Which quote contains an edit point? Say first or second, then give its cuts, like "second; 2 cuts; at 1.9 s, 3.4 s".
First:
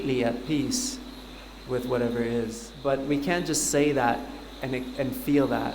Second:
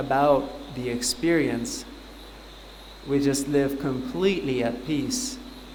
first; 1 cut; at 2.7 s